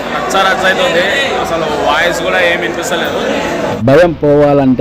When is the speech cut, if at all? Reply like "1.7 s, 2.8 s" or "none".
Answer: 3.7 s